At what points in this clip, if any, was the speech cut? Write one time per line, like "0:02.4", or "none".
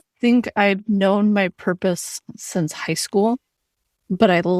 none